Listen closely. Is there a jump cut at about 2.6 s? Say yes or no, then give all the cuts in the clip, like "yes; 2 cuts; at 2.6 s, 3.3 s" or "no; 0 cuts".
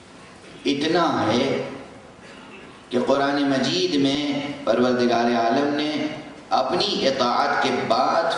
no; 1 cut; at 6.8 s